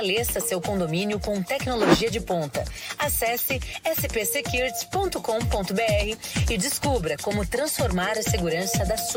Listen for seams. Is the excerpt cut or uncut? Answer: uncut